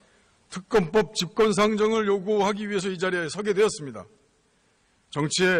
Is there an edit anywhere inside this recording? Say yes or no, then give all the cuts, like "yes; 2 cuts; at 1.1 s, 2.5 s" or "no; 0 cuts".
no; 0 cuts